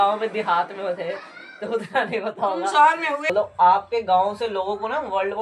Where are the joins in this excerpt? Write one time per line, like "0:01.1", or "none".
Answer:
0:03.3